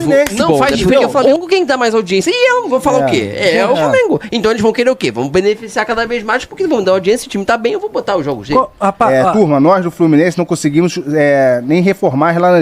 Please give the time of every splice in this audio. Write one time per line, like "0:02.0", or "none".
0:01.4
0:09.1

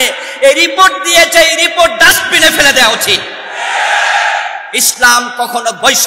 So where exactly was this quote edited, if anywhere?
none

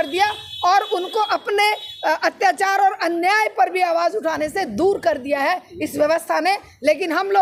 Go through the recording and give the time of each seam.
none

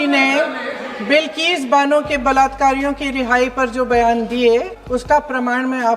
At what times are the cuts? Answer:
0:04.8

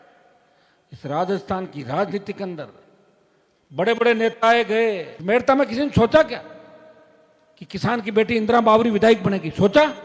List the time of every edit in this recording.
0:05.1

